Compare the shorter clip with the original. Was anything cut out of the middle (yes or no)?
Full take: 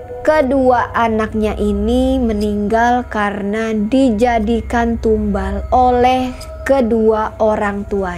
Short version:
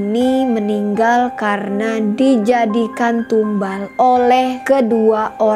yes